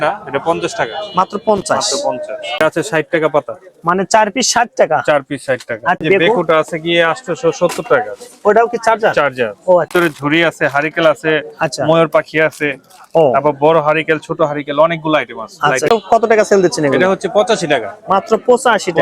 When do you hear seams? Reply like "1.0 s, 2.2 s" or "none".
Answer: 2.6 s, 6.0 s, 9.9 s, 15.9 s